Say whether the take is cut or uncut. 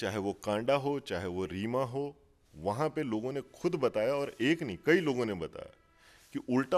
uncut